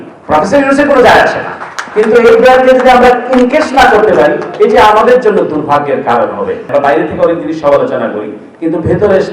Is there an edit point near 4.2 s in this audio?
no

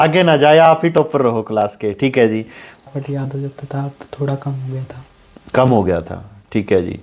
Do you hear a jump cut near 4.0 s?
no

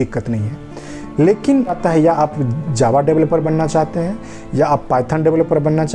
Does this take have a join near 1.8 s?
yes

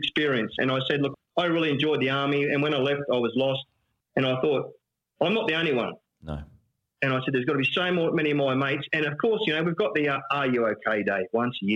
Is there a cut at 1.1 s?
yes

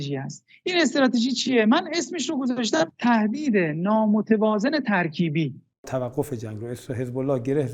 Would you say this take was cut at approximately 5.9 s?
yes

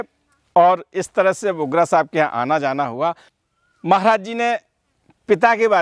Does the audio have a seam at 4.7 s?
no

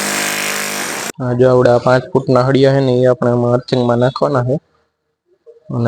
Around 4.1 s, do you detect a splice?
no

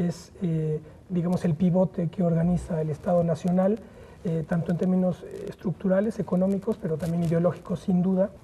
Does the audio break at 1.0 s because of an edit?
no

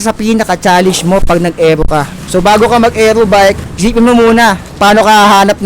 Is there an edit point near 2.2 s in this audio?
yes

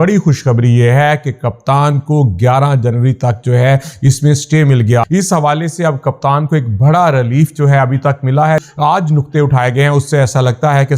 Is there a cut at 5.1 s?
yes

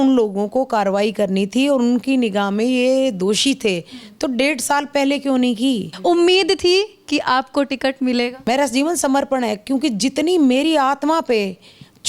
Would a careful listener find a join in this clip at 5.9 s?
yes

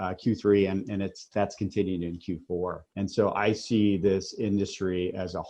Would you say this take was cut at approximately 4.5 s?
no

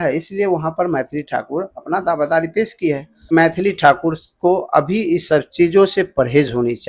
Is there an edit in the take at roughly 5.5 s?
no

